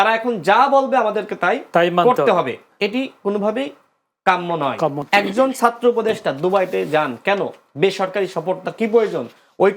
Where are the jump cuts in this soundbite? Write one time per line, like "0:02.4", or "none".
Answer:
0:05.0